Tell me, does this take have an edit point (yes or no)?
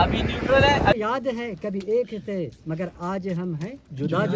yes